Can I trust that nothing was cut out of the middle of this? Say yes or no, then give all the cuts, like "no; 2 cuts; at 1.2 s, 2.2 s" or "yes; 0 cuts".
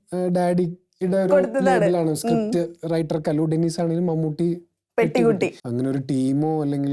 no; 1 cut; at 5.6 s